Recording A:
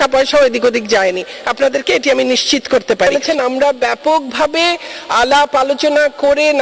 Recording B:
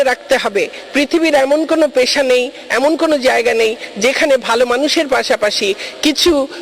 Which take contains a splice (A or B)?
A